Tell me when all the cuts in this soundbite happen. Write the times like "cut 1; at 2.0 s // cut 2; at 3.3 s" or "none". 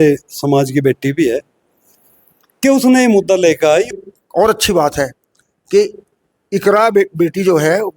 cut 1; at 3.9 s